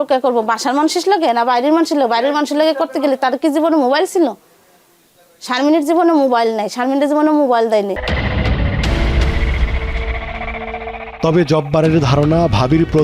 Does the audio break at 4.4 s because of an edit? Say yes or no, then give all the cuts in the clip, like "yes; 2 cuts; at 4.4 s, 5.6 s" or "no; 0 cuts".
no; 0 cuts